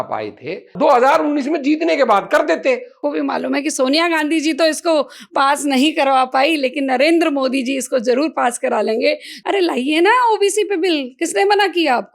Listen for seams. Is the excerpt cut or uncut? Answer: cut